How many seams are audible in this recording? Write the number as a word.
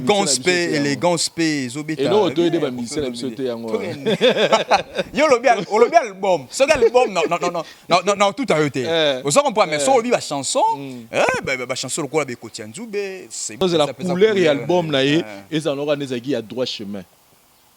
one